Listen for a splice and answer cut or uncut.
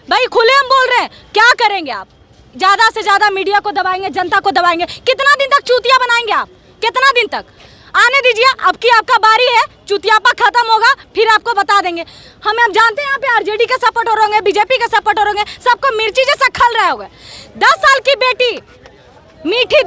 uncut